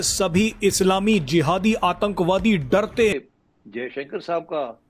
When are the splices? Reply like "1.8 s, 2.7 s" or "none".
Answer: 3.2 s